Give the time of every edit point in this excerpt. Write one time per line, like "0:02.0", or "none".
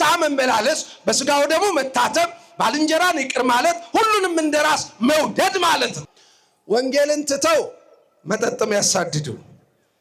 0:06.0